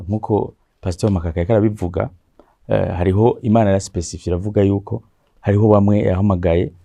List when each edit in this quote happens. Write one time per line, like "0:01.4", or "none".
none